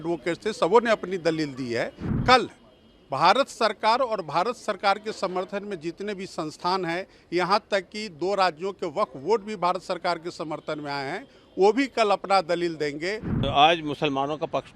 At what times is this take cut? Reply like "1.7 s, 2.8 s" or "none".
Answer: 2.2 s, 13.3 s